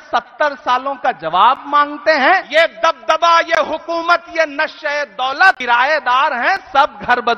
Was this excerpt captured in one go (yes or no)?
no